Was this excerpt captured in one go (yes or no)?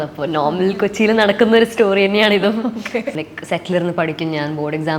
no